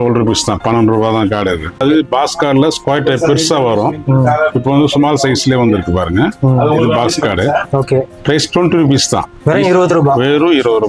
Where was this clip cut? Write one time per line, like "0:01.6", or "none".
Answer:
0:01.8